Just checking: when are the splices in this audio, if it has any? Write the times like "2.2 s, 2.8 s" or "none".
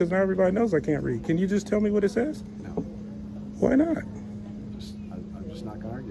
none